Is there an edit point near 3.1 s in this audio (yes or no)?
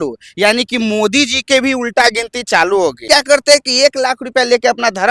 yes